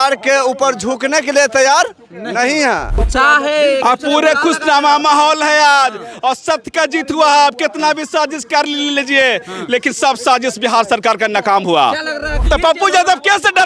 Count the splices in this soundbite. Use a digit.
2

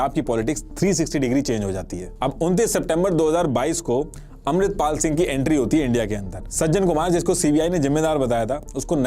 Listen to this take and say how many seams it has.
2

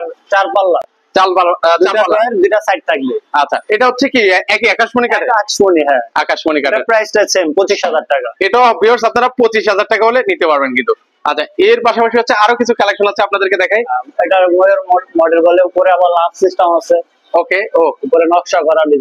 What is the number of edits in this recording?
0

